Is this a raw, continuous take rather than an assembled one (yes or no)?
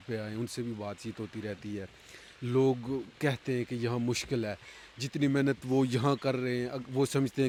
yes